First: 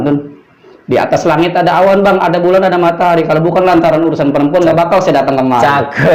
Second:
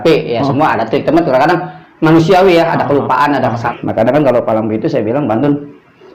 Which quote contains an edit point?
second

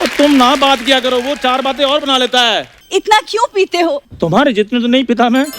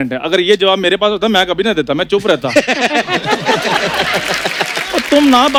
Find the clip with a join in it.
first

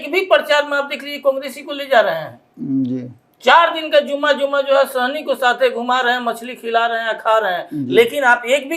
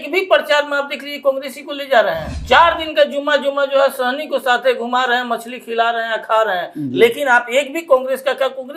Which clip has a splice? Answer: second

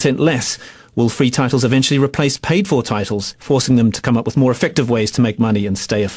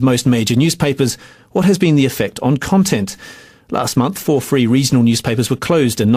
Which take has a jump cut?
first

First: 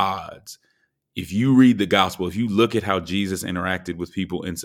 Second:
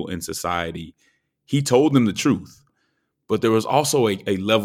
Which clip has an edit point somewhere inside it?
second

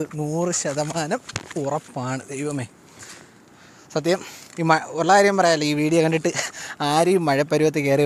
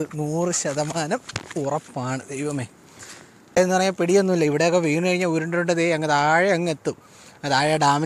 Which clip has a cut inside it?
second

